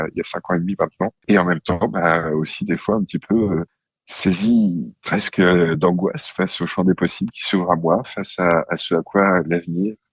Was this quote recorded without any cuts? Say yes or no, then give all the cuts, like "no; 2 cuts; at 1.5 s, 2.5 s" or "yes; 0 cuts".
yes; 0 cuts